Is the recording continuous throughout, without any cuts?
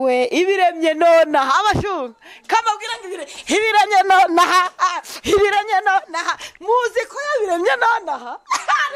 yes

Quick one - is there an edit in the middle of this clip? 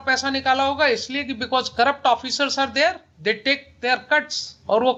no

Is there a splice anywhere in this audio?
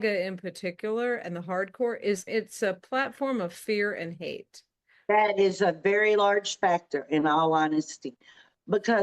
yes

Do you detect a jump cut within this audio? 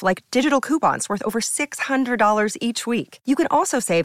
no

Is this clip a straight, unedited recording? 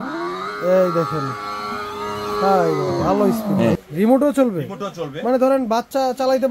no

